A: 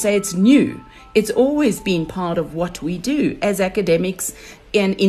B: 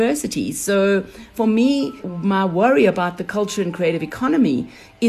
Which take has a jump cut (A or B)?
B